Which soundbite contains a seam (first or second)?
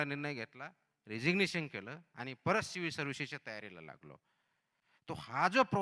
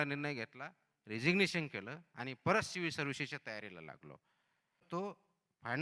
second